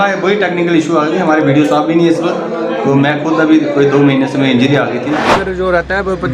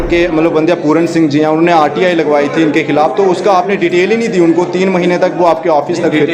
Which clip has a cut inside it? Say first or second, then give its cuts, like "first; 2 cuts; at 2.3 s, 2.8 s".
first; 1 cut; at 5.3 s